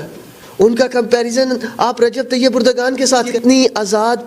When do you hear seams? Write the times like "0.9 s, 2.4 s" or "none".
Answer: 3.4 s